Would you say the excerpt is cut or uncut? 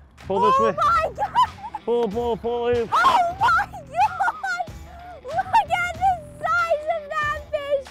uncut